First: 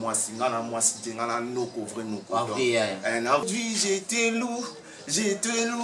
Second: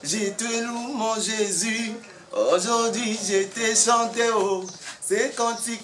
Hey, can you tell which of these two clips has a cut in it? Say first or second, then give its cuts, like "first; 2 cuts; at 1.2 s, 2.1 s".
first; 1 cut; at 3.4 s